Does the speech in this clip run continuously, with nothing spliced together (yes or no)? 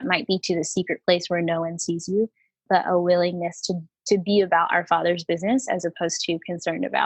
yes